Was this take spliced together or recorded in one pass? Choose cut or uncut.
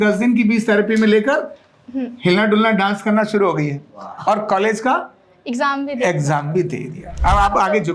cut